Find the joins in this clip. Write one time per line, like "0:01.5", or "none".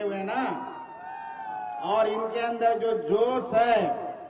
none